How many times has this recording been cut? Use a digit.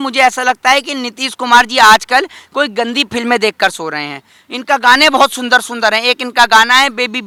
0